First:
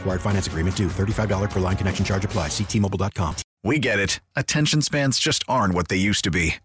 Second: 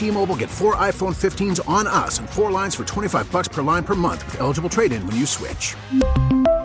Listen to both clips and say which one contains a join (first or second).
first